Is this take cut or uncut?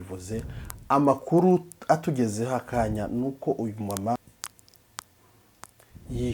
cut